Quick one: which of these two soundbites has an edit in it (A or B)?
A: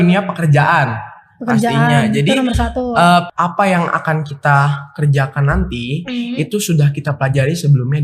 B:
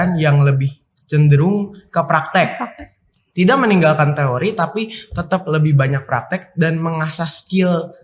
A